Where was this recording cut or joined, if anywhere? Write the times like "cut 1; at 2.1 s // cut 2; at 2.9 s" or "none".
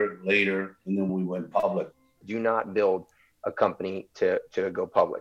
cut 1; at 1.1 s // cut 2; at 2.2 s